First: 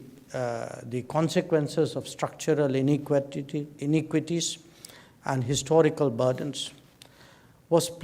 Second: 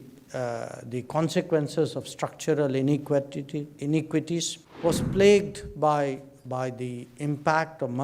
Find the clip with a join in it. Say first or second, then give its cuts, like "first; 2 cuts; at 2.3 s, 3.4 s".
second; 1 cut; at 4.6 s